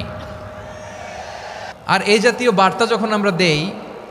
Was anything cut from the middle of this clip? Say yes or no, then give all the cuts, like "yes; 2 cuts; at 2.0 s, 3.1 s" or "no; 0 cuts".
yes; 1 cut; at 1.7 s